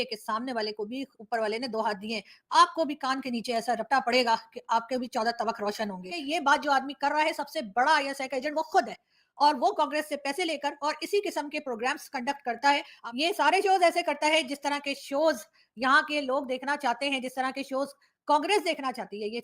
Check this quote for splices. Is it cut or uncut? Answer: cut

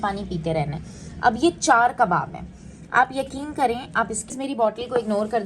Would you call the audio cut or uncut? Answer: cut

